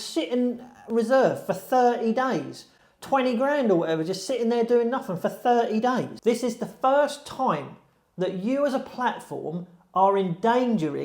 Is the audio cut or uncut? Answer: cut